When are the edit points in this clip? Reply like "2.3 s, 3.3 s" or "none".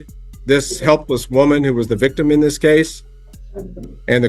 none